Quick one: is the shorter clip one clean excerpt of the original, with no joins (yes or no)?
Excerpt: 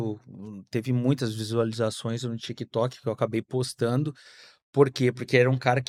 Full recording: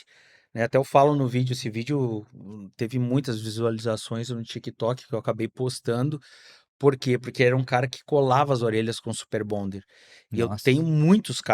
yes